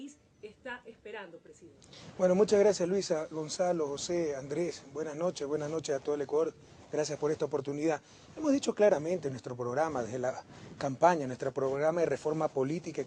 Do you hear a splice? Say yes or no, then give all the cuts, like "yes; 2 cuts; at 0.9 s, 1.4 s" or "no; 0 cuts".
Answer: no; 0 cuts